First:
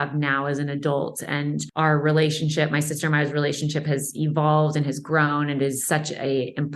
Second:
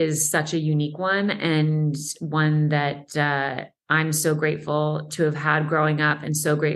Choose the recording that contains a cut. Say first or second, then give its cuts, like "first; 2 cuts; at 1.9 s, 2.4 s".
first; 1 cut; at 1.7 s